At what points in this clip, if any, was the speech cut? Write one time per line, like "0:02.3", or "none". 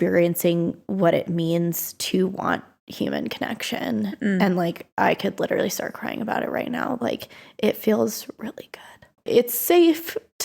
0:09.1